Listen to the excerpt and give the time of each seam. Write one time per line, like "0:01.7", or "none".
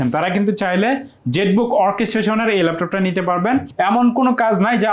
0:03.7